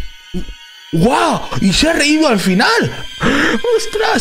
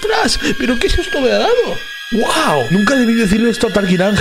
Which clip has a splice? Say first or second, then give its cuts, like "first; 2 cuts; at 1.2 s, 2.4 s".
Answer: first; 1 cut; at 3.0 s